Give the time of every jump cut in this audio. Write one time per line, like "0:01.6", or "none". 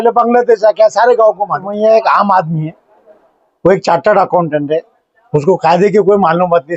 0:01.8